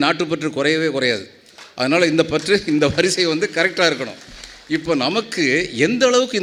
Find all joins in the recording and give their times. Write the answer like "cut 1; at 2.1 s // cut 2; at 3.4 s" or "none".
none